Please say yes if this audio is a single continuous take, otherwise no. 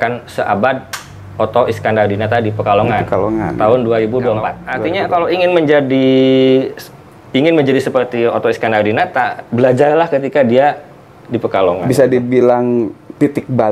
no